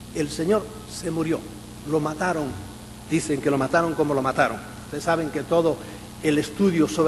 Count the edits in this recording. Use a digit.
0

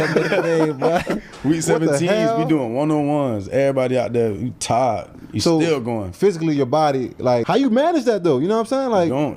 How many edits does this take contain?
1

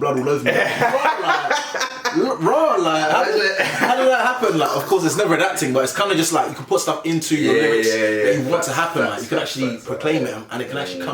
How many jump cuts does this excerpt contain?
0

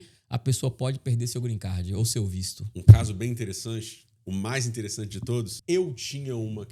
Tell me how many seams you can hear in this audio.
1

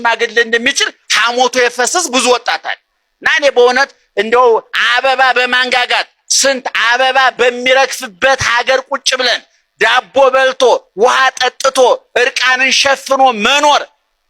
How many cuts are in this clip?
0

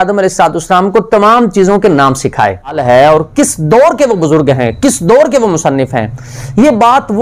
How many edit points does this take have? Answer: 1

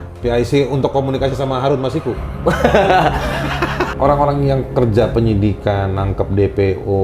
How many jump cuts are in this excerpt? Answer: 1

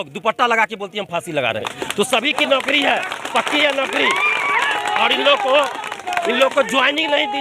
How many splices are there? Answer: 1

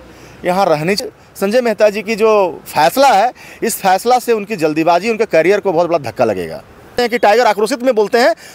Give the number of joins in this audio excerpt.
2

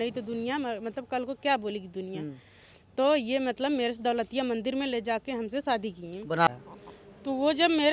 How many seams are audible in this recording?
1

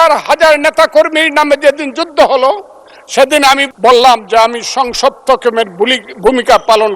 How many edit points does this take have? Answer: 1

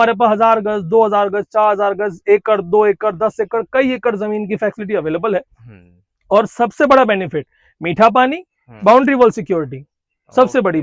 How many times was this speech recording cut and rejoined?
0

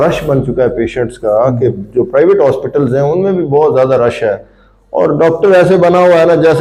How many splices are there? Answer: 0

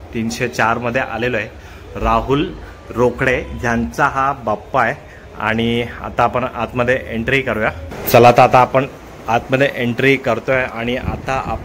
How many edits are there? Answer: 0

